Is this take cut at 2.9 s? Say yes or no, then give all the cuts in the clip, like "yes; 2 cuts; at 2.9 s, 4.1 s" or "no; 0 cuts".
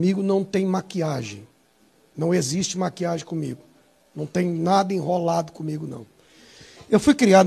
no; 1 cut; at 1.2 s